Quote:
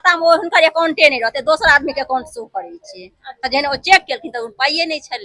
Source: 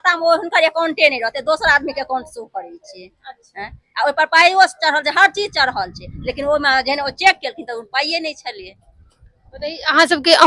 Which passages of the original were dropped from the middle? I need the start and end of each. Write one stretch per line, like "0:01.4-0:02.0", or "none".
0:03.5-0:06.8